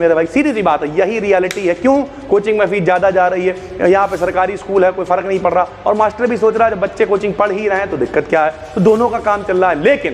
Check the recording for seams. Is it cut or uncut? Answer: uncut